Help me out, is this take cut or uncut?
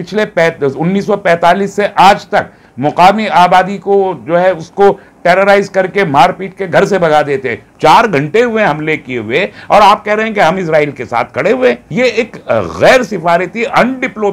cut